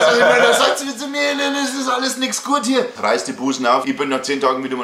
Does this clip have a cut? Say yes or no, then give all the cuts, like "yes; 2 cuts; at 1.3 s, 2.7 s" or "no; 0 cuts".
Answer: yes; 2 cuts; at 2.9 s, 3.8 s